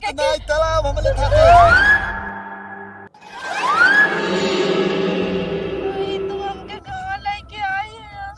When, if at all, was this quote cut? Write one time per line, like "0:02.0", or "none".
none